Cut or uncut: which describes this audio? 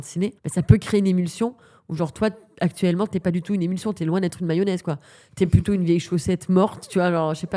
uncut